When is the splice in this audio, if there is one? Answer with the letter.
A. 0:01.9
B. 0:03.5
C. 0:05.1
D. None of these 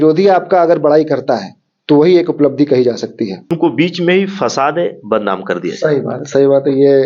B